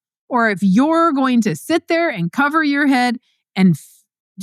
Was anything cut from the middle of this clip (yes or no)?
no